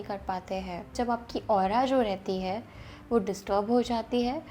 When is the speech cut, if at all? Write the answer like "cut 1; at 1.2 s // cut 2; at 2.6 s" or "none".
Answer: cut 1; at 0.9 s